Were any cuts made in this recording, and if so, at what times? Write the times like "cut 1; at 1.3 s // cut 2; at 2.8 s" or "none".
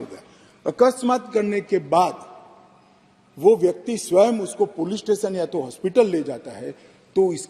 none